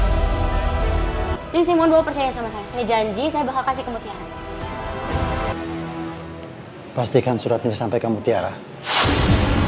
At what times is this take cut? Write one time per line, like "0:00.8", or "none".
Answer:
none